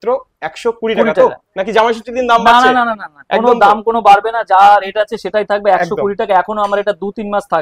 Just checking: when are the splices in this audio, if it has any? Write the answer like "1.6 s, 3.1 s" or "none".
none